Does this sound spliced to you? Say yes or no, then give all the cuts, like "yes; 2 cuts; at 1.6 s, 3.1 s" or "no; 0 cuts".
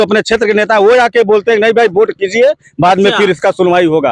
no; 0 cuts